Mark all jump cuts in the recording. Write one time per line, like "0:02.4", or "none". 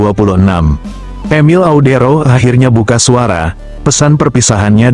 0:01.2